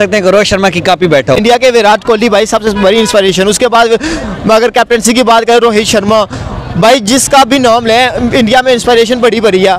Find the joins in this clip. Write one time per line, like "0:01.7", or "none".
0:01.4